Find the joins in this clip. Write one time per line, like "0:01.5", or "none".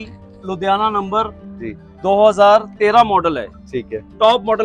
none